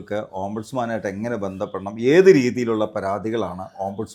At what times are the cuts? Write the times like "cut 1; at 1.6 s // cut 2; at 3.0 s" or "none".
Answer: none